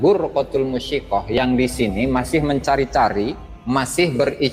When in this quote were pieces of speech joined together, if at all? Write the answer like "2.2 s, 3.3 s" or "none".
3.5 s